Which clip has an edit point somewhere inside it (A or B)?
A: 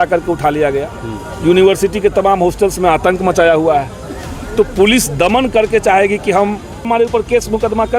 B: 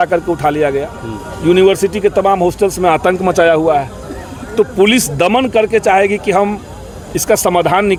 A